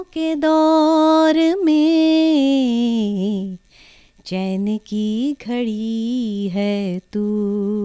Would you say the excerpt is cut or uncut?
uncut